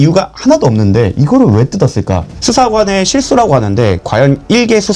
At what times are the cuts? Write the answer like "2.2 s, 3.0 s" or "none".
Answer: 2.3 s